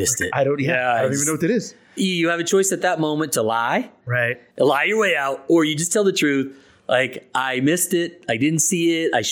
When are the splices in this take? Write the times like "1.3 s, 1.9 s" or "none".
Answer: 2.0 s